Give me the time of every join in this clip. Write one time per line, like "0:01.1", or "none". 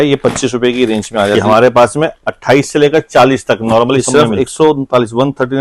0:01.3
0:04.1

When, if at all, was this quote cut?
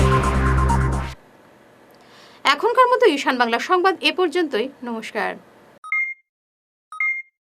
none

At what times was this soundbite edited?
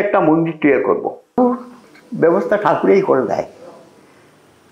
0:01.4

